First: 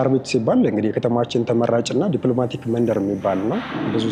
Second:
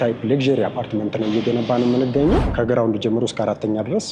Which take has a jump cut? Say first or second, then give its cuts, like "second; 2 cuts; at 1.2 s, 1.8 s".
second; 1 cut; at 2.5 s